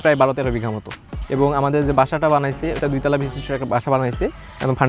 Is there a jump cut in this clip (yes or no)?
no